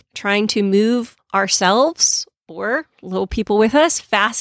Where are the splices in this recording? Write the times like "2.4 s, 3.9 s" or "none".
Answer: 1.2 s